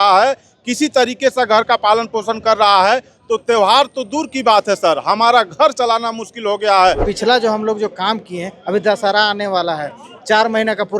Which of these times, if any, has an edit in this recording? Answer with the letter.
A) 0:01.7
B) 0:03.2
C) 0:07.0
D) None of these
C